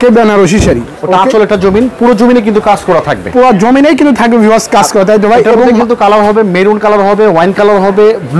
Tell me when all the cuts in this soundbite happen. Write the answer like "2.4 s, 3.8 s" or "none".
none

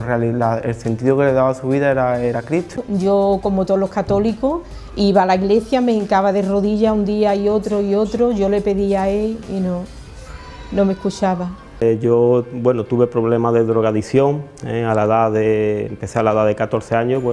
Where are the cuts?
2.8 s, 11.8 s

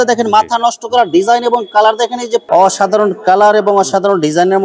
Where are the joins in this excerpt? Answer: 2.4 s

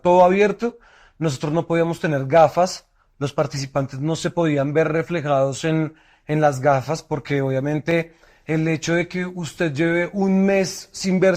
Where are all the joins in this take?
none

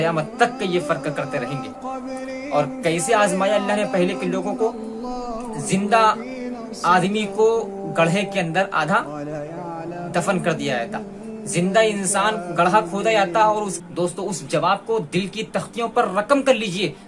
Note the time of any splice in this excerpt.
13.8 s

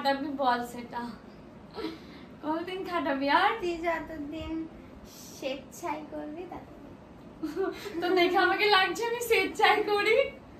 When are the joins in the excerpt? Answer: none

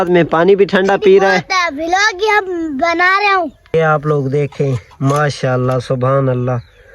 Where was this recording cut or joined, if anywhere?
3.7 s

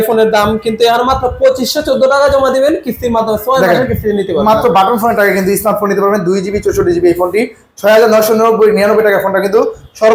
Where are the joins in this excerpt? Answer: none

